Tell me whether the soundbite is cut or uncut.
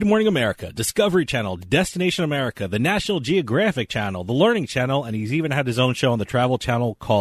uncut